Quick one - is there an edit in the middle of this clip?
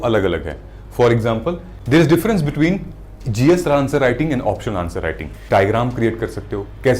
yes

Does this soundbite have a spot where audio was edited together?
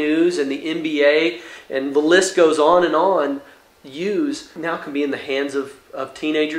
yes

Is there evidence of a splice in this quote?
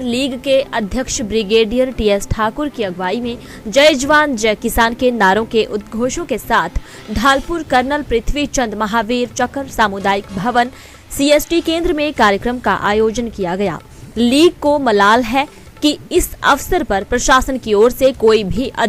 no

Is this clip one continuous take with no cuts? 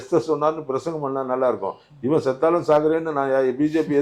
yes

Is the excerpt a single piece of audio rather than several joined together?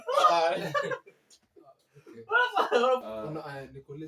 no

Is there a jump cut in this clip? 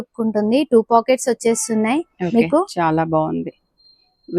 no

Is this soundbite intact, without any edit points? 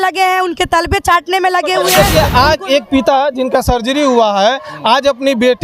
no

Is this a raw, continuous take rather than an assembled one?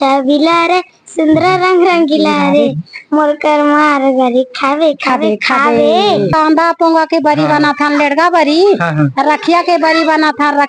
no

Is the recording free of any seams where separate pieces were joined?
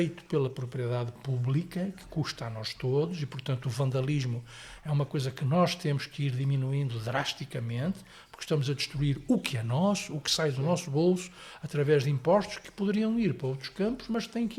yes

